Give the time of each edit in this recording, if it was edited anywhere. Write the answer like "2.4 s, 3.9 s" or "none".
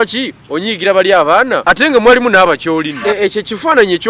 1.6 s, 2.9 s

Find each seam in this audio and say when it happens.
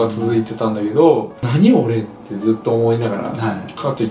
1.4 s

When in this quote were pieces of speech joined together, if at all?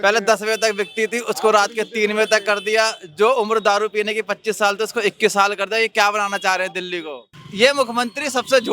7.4 s

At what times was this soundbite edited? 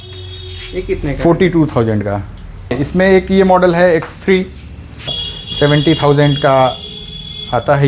2.7 s, 5.2 s

